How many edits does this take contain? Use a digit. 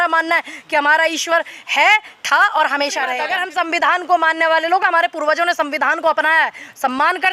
1